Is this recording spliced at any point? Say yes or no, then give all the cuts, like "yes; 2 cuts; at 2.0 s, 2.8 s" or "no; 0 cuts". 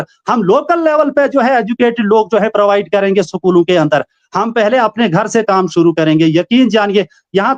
no; 0 cuts